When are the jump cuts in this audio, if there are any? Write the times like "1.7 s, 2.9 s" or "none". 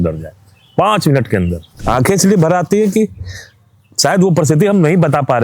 1.6 s

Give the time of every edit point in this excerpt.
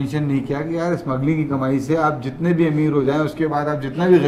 none

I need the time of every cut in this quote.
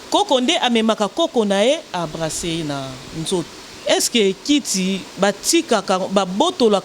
3.6 s

